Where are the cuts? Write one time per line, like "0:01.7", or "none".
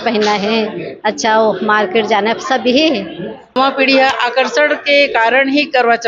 0:03.5